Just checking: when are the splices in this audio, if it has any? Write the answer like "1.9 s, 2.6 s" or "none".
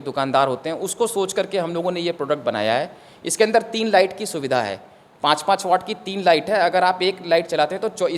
none